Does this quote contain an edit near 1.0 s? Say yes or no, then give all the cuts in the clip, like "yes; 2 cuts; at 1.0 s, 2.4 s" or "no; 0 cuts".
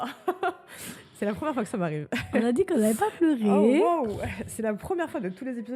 no; 0 cuts